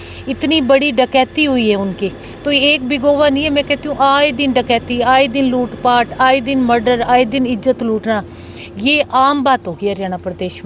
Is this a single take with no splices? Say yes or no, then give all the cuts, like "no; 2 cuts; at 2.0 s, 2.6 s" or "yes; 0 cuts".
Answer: yes; 0 cuts